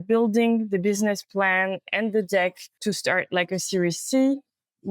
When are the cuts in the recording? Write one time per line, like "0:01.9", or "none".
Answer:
0:02.7